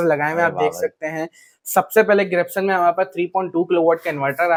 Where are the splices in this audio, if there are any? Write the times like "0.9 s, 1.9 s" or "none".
none